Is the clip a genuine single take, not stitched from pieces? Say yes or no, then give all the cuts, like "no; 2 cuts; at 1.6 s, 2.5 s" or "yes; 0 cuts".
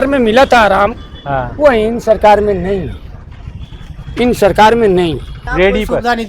no; 1 cut; at 5.3 s